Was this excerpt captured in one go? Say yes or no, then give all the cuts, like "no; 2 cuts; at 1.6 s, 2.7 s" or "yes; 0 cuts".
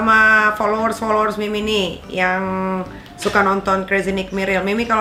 yes; 0 cuts